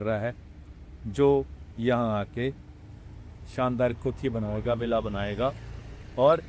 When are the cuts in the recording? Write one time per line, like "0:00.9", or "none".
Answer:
none